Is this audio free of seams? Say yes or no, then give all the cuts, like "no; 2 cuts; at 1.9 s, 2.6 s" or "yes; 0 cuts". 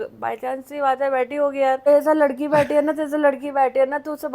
no; 1 cut; at 1.9 s